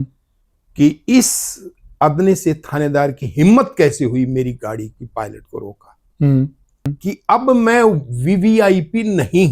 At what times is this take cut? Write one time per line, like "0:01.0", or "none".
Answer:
0:06.9